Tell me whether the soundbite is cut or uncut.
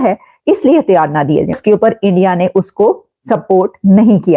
cut